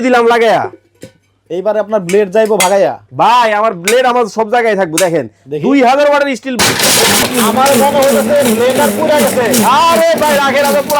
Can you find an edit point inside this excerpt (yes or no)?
yes